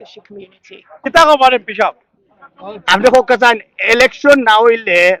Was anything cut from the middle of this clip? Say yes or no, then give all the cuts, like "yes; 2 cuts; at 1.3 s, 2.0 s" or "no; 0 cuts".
no; 0 cuts